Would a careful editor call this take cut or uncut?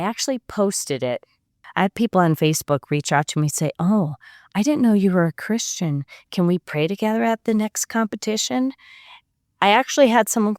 cut